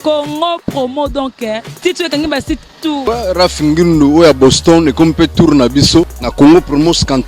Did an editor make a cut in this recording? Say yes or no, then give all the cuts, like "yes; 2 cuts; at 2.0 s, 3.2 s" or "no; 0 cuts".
yes; 2 cuts; at 3.0 s, 6.2 s